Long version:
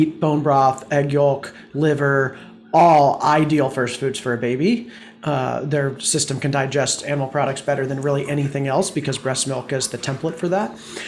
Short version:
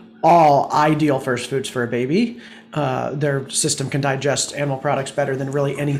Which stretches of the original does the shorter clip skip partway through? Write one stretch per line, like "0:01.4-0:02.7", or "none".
none